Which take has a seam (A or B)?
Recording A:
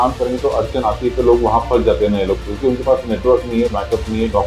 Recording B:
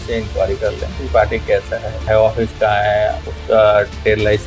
B